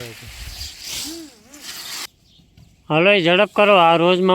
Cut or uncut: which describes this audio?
cut